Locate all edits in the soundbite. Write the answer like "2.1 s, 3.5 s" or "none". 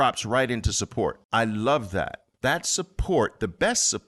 1.2 s, 2.2 s